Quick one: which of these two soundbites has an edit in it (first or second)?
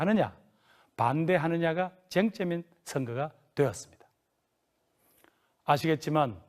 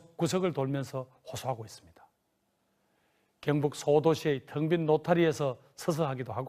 first